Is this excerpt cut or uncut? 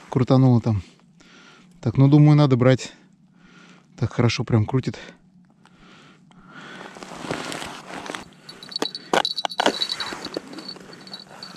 cut